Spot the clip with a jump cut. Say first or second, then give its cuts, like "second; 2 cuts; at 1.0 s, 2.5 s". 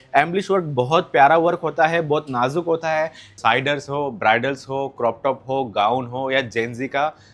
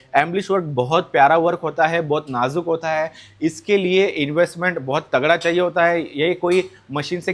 first; 1 cut; at 3.2 s